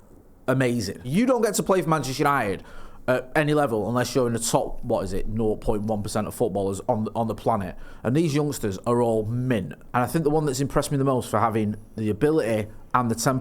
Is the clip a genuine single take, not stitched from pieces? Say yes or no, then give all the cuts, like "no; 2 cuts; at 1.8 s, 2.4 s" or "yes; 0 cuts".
no; 2 cuts; at 1.0 s, 9.8 s